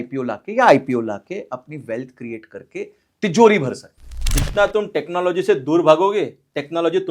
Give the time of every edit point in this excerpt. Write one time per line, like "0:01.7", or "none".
0:04.2